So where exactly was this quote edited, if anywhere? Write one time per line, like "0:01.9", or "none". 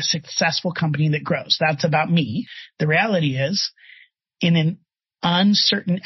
0:02.6